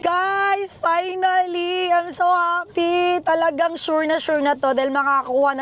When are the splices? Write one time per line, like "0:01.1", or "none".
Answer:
none